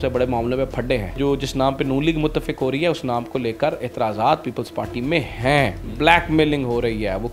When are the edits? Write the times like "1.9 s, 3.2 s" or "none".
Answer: 1.2 s, 5.8 s